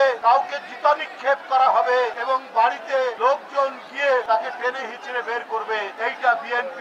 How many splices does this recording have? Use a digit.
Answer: 4